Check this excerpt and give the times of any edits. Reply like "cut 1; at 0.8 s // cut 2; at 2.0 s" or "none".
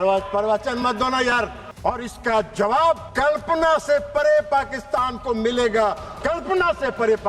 cut 1; at 1.6 s // cut 2; at 3.1 s